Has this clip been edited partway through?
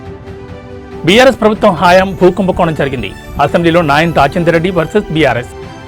yes; 1 cut; at 0.9 s

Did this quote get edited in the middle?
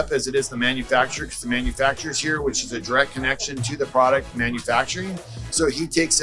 no; 0 cuts

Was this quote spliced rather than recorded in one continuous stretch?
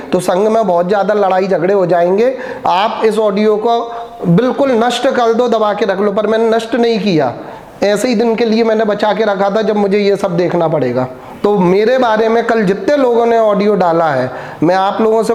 no; 0 cuts

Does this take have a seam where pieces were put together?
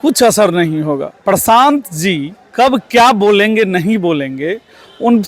yes; 1 cut; at 1.1 s

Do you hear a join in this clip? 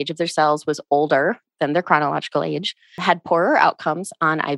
yes; 1 cut; at 3.0 s

